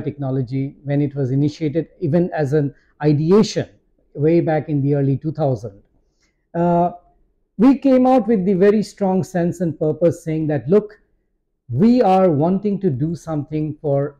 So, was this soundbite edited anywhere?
no; 0 cuts

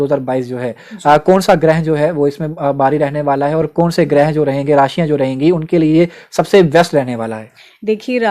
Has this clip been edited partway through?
no; 0 cuts

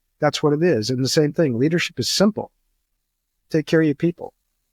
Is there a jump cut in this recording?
no; 0 cuts

